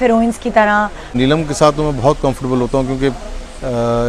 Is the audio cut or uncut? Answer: cut